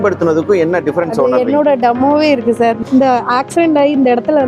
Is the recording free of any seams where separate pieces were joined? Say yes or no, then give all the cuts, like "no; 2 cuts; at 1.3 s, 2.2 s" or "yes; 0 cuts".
no; 1 cut; at 2.8 s